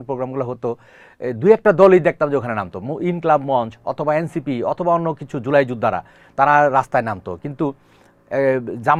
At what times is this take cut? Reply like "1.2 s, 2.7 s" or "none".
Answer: none